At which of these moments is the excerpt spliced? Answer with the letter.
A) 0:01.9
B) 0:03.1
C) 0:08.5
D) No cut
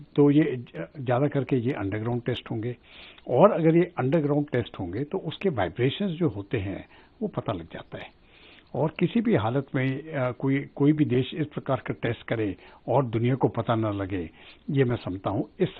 D